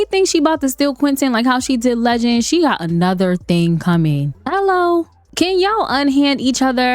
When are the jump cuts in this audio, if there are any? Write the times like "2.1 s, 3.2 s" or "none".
4.3 s, 5.2 s